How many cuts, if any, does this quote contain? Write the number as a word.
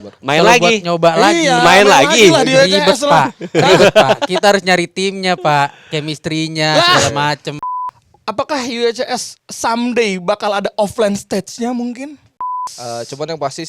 two